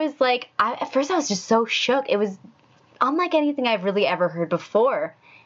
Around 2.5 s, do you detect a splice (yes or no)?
no